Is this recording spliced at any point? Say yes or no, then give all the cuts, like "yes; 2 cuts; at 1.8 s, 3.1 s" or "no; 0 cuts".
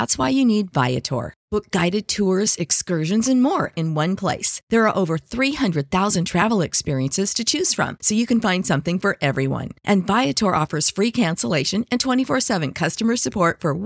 no; 0 cuts